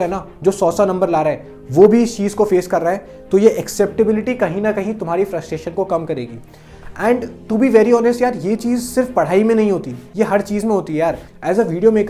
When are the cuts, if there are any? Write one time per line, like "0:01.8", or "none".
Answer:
none